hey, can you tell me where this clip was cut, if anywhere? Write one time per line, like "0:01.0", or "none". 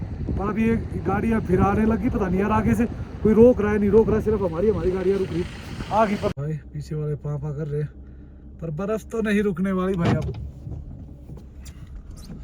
0:06.4

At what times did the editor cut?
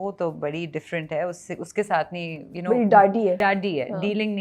0:03.4

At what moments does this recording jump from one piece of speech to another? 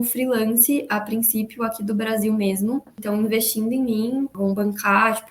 0:03.0
0:04.3

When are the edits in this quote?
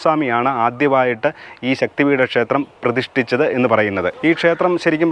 0:04.1

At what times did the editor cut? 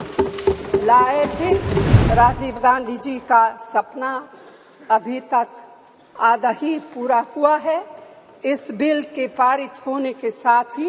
0:01.9

